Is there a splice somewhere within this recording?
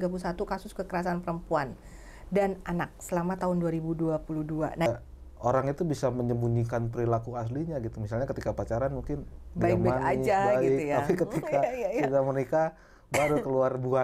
yes; 1 cut; at 4.9 s

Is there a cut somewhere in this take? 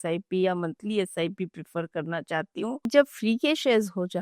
yes; 1 cut; at 2.9 s

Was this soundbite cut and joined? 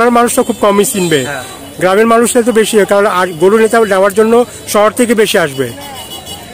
no; 0 cuts

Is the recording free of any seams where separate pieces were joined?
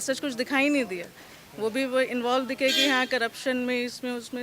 yes; 0 cuts

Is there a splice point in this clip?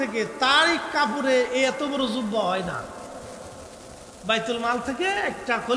no; 0 cuts

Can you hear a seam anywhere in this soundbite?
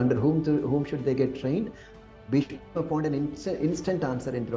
no; 0 cuts

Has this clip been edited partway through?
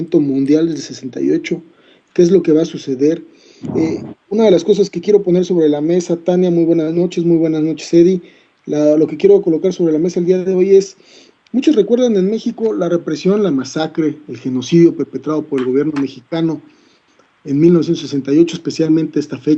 no; 0 cuts

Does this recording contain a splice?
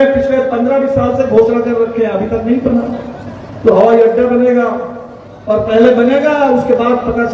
no; 0 cuts

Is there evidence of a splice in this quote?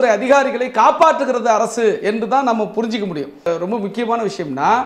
yes; 1 cut; at 3.4 s

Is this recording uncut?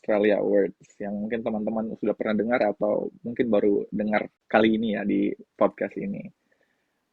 no; 2 cuts; at 4.4 s, 5.4 s

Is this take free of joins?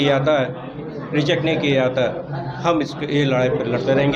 yes; 0 cuts

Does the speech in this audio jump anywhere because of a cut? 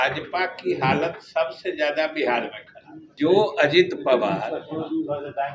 yes; 1 cut; at 3.1 s

